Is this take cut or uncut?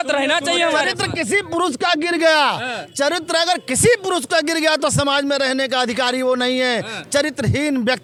uncut